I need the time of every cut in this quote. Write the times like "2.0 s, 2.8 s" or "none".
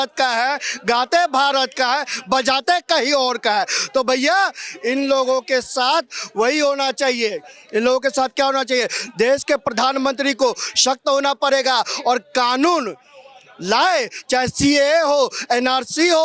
none